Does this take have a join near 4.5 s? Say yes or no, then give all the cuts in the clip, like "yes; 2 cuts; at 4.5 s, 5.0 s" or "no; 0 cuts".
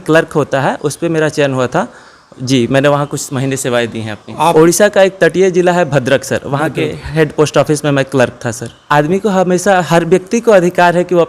yes; 2 cuts; at 4.5 s, 8.8 s